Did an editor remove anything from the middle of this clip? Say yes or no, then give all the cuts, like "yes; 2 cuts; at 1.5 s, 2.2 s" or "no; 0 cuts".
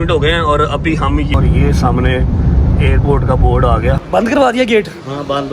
yes; 2 cuts; at 1.3 s, 4.1 s